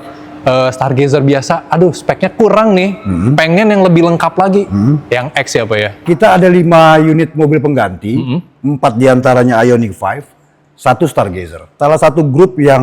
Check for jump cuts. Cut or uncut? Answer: cut